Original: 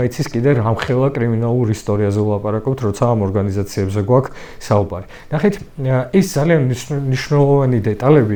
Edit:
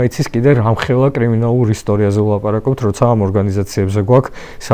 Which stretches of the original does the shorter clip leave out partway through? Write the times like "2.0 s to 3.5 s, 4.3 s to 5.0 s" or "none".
none